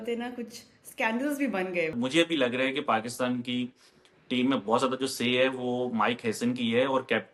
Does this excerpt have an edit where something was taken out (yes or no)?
yes